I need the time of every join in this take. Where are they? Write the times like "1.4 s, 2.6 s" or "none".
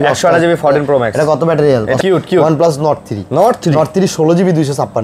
2.0 s